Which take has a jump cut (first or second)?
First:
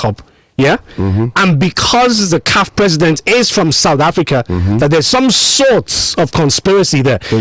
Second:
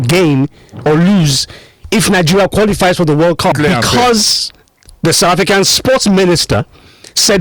second